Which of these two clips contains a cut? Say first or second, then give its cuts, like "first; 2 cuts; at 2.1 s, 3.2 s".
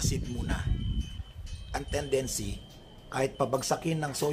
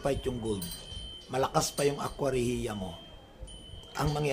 first; 1 cut; at 1.2 s